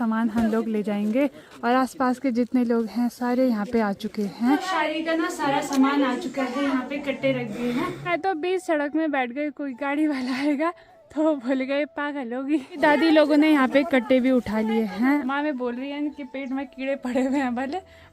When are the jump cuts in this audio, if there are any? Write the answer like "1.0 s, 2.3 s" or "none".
4.6 s, 8.1 s, 12.7 s, 15.2 s